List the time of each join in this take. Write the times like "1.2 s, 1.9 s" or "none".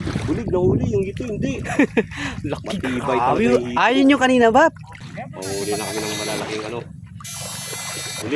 4.9 s